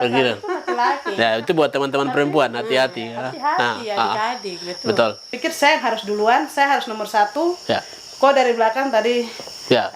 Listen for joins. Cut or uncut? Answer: cut